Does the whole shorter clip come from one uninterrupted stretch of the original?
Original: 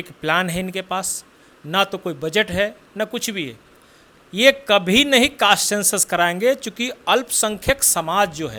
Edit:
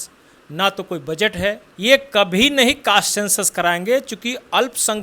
no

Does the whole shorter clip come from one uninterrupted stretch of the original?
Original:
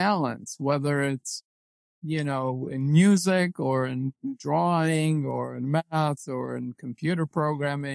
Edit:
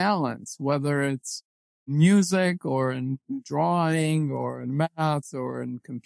no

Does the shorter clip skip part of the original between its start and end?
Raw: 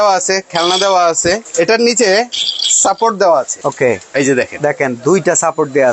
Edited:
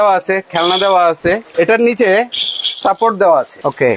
no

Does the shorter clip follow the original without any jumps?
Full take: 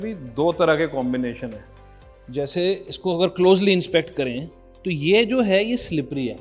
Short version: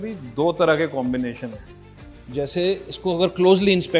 yes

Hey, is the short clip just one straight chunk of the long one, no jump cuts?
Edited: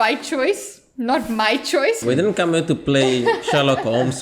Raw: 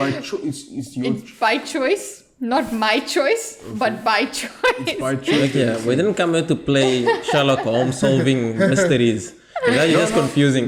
no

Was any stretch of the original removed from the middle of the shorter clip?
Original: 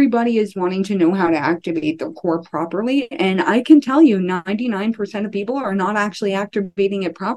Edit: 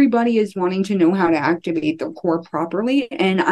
no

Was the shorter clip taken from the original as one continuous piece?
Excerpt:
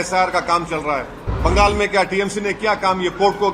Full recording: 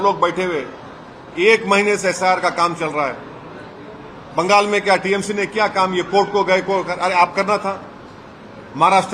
no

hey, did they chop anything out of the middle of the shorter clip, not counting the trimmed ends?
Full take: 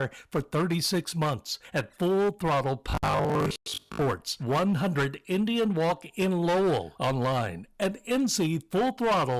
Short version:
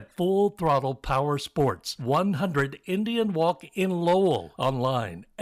yes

